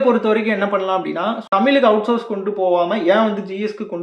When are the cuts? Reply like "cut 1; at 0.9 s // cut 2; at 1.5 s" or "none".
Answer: cut 1; at 1.4 s